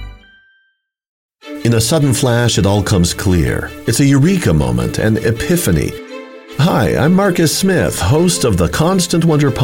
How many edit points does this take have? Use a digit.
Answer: 1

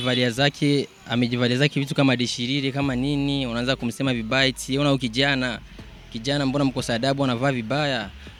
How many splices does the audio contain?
0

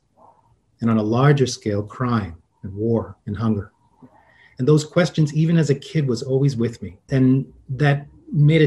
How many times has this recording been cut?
1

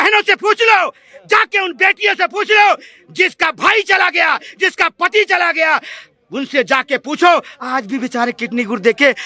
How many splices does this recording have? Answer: 0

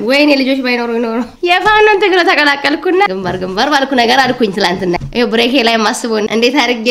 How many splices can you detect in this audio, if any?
2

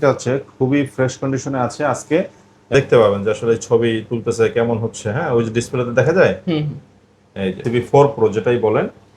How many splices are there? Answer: 2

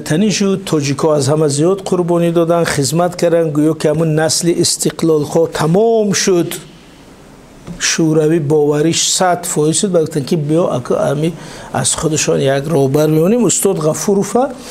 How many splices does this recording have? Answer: 0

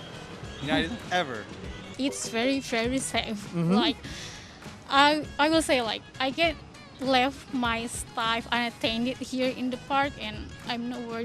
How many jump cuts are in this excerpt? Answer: 1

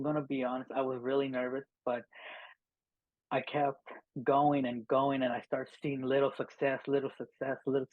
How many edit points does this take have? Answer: 0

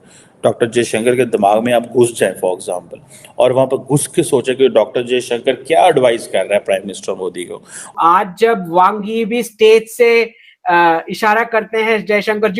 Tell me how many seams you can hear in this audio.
1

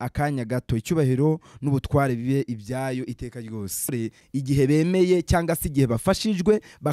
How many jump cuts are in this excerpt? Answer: 1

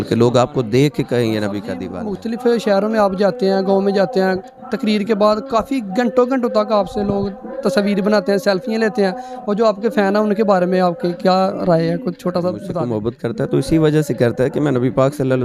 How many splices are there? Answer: 2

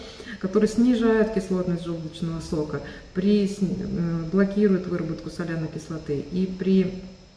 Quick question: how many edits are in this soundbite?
0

